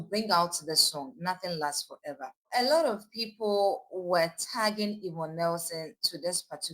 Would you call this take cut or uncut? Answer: cut